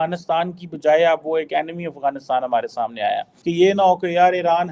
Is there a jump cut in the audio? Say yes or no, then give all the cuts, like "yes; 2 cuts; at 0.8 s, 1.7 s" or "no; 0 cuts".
yes; 1 cut; at 3.3 s